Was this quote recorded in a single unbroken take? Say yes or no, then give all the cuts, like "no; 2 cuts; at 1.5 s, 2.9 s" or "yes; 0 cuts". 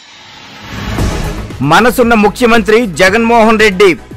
no; 1 cut; at 1.3 s